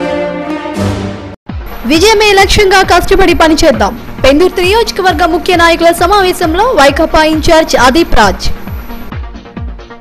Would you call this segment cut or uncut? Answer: uncut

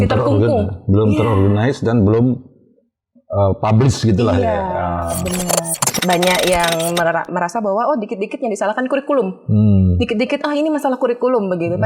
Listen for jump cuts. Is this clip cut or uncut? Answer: cut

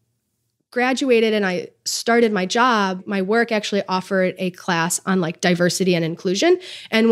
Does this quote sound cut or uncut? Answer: cut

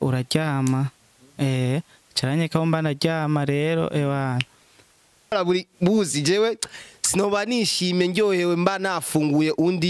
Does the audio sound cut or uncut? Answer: cut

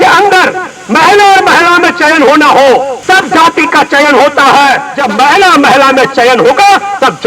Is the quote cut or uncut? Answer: cut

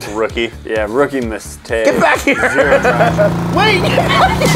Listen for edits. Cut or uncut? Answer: cut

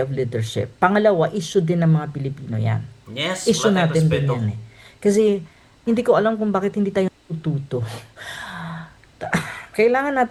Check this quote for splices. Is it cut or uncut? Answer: uncut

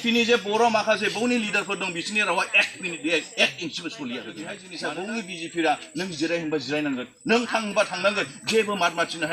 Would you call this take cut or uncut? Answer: cut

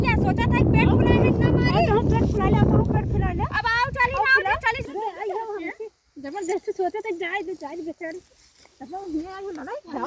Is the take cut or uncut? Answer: cut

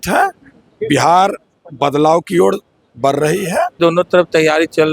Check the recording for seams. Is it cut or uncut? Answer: cut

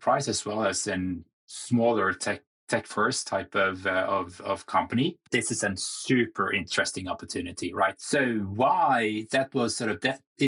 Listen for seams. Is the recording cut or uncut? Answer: uncut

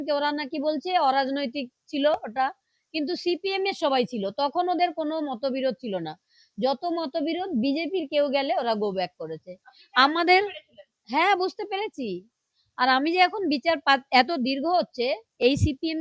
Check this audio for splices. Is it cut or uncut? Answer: uncut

